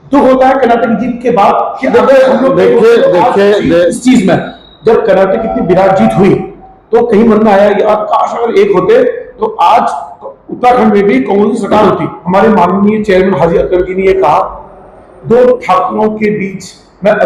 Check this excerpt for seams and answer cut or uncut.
cut